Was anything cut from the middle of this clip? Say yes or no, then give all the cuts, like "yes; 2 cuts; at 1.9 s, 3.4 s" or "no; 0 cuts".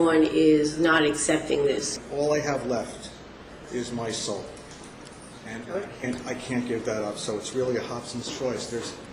yes; 1 cut; at 1.9 s